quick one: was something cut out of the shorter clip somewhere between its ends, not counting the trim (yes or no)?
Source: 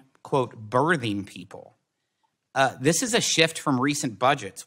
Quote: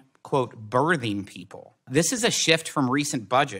yes